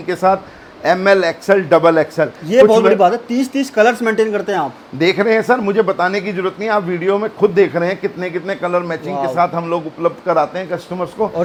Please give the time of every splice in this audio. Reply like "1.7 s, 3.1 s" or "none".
none